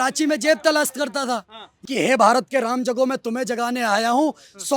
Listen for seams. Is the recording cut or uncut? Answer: cut